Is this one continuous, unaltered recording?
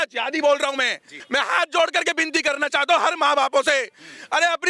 no; 1 cut; at 1.1 s

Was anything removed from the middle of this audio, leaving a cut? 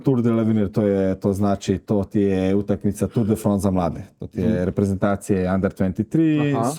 no; 0 cuts

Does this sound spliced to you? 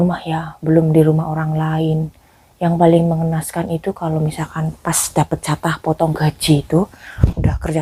no; 0 cuts

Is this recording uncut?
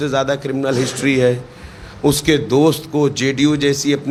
yes; 0 cuts

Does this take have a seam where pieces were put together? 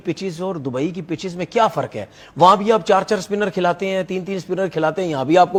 no; 0 cuts

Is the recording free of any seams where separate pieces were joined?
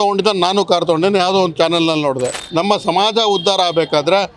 no; 1 cut; at 2.4 s

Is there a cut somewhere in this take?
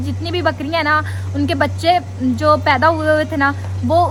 no; 0 cuts

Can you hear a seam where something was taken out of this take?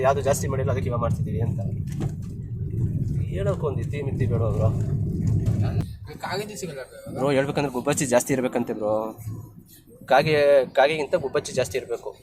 yes; 1 cut; at 5.8 s

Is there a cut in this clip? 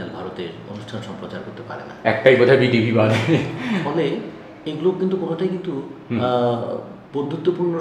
no; 0 cuts

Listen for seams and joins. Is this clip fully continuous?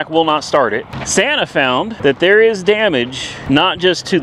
no; 3 cuts; at 1.0 s, 1.9 s, 3.3 s

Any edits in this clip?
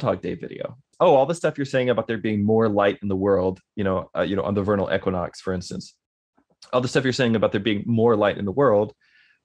yes; 1 cut; at 0.9 s

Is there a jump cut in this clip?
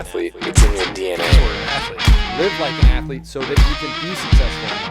no; 0 cuts

